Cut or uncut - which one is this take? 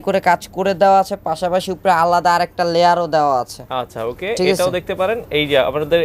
uncut